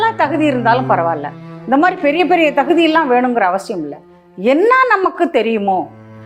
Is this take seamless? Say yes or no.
yes